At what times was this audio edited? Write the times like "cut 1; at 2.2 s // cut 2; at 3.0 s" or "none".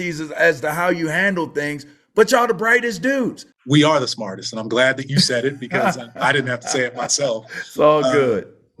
cut 1; at 3.5 s